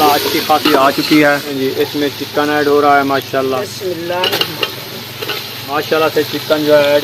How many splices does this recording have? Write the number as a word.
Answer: two